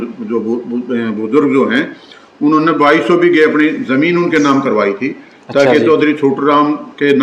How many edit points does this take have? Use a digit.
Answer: 0